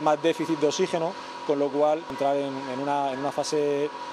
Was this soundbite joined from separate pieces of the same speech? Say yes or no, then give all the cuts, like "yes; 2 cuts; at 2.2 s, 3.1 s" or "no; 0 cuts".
yes; 1 cut; at 2.1 s